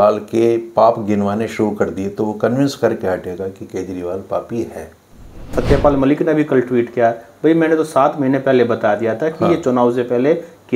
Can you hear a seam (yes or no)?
yes